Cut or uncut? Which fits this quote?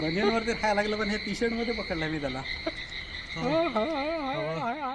uncut